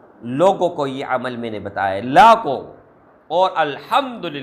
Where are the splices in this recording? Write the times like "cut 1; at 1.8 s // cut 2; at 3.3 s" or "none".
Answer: none